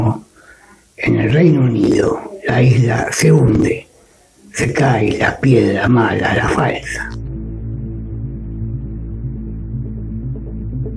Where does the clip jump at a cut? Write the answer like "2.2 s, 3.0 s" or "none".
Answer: 6.9 s